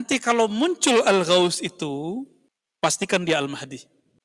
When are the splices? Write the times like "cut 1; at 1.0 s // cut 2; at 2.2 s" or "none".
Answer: cut 1; at 2.9 s